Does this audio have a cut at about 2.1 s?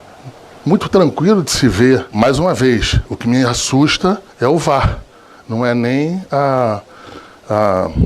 yes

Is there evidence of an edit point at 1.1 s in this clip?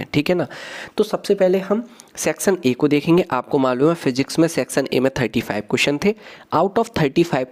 no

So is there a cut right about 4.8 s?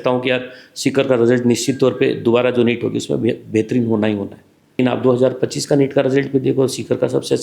yes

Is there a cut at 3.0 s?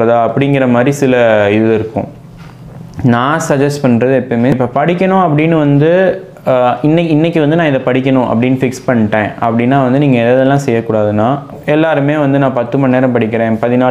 no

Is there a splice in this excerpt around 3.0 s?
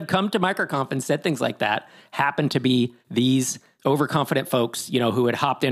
yes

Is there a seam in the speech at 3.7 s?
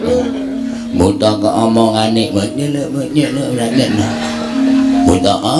no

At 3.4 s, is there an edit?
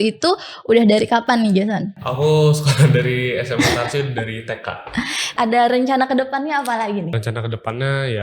no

